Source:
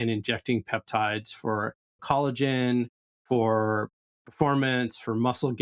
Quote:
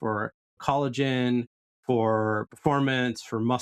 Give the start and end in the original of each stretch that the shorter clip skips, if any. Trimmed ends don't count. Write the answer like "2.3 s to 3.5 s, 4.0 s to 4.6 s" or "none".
3.9 s to 4.2 s